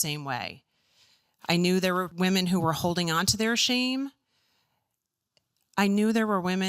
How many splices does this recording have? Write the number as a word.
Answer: one